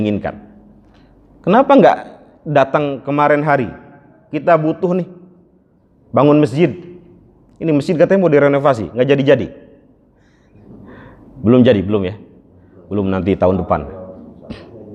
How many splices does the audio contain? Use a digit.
0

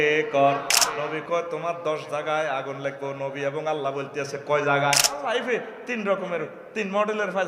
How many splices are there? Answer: 2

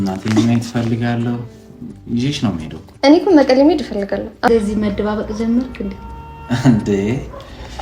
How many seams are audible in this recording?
1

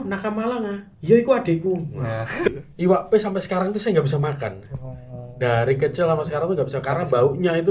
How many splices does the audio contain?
1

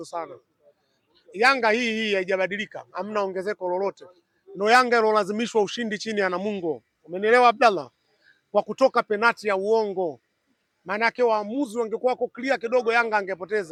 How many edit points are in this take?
0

